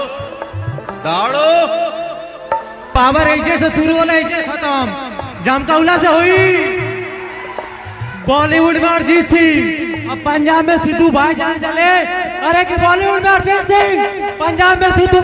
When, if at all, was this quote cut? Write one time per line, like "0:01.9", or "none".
0:02.9

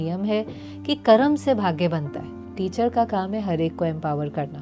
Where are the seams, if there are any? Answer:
0:02.3

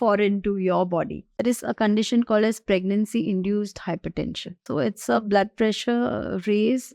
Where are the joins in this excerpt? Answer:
0:01.4
0:04.7

